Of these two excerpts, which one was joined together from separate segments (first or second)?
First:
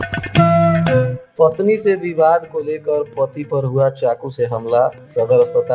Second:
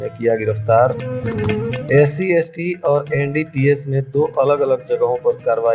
first